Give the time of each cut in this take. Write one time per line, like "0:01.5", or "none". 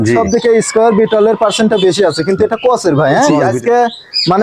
0:03.4

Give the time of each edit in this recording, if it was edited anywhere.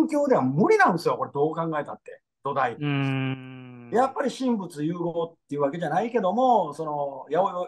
none

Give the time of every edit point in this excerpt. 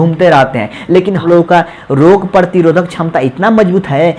0:01.2

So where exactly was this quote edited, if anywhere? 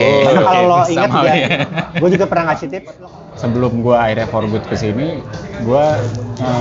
0:03.0

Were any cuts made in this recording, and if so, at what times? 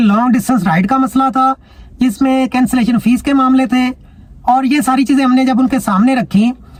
none

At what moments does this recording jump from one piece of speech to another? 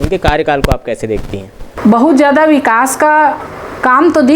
0:01.7

